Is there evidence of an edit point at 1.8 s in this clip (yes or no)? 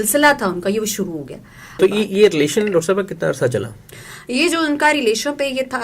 yes